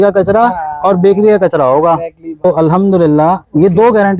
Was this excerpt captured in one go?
no; 1 cut; at 2.4 s

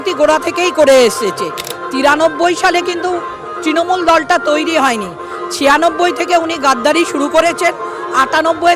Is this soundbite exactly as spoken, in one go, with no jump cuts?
yes; 0 cuts

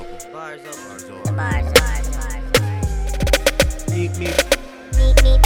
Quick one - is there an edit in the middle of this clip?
no; 0 cuts

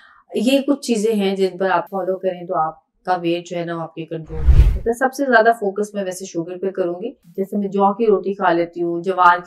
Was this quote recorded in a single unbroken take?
no; 1 cut; at 7.2 s

